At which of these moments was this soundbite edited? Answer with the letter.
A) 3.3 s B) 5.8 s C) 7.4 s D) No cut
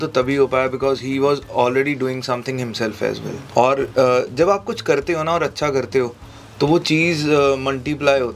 A